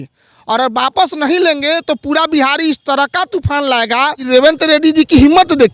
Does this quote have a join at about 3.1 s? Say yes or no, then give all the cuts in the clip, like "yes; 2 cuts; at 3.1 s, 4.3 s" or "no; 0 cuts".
no; 1 cut; at 4.3 s